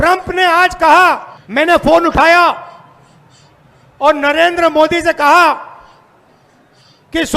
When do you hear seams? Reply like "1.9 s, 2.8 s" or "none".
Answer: 1.5 s